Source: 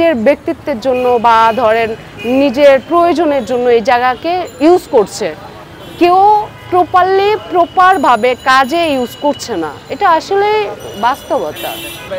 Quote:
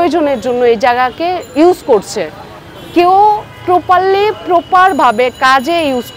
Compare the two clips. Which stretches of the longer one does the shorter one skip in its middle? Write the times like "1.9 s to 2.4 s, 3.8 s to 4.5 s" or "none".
none